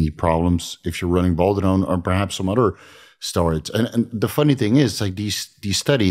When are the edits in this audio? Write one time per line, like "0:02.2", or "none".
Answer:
none